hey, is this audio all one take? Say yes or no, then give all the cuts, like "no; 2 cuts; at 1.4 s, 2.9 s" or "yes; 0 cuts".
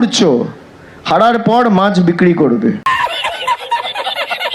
no; 1 cut; at 2.8 s